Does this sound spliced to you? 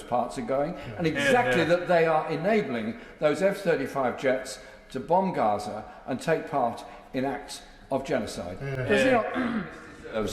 no; 0 cuts

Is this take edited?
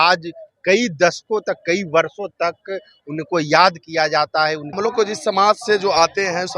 yes; 1 cut; at 4.7 s

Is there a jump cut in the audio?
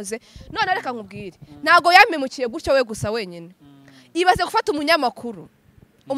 no; 0 cuts

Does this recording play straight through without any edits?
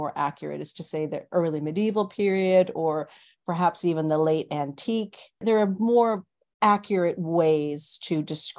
no; 1 cut; at 5.4 s

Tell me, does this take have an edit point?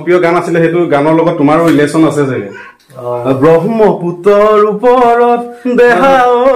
no; 0 cuts

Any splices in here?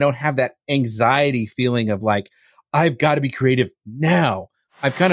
no; 0 cuts

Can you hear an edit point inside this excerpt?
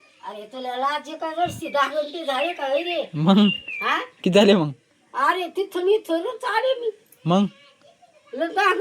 no; 0 cuts

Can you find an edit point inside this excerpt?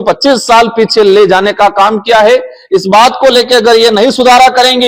no; 0 cuts

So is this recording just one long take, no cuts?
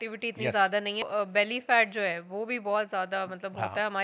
no; 1 cut; at 1.1 s

